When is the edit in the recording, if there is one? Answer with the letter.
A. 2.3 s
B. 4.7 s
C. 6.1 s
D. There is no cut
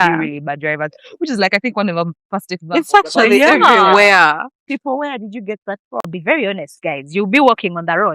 C